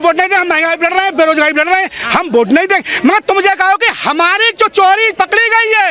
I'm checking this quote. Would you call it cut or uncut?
uncut